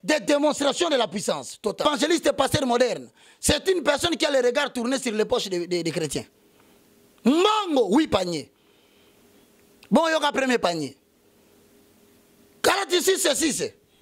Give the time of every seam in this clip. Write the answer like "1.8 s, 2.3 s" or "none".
1.8 s